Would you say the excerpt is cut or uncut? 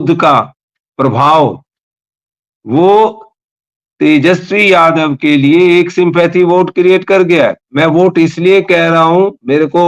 uncut